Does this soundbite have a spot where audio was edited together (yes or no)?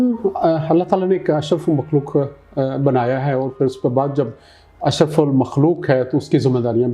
no